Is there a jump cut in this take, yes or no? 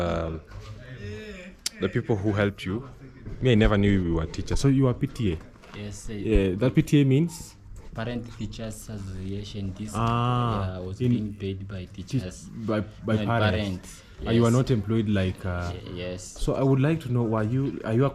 no